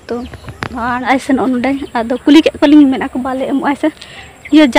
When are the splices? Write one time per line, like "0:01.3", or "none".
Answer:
0:01.1